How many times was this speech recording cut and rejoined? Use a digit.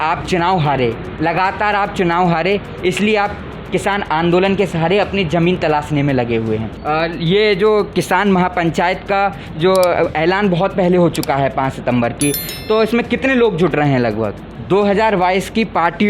2